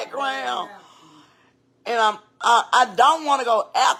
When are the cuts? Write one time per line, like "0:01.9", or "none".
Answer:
none